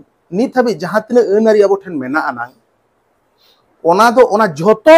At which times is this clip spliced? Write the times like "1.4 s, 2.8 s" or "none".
none